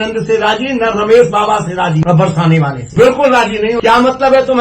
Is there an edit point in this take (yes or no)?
yes